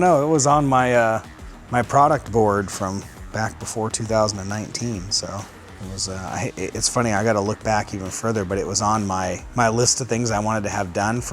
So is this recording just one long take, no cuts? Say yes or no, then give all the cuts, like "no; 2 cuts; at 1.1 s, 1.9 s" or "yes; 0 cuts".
no; 2 cuts; at 3.2 s, 9.4 s